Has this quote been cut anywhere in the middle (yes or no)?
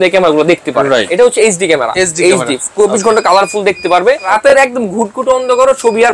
yes